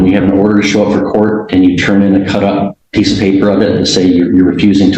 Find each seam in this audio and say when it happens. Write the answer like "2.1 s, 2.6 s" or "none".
2.8 s